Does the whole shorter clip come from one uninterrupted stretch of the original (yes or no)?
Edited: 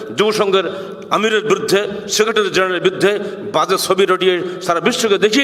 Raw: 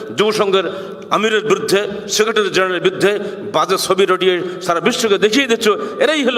yes